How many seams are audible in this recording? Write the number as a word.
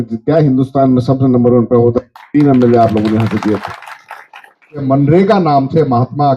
one